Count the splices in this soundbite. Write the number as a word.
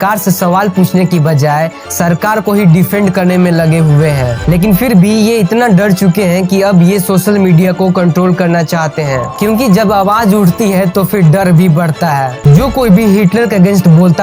three